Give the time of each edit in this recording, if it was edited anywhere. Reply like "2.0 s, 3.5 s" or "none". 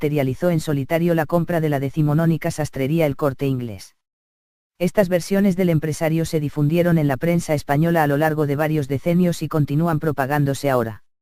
1.4 s